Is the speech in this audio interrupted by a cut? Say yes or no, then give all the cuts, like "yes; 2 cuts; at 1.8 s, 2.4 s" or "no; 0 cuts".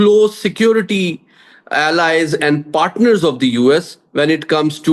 no; 0 cuts